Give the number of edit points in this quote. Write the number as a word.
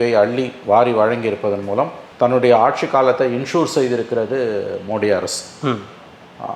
zero